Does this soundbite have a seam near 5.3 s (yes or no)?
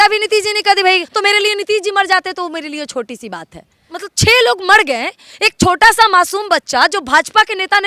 no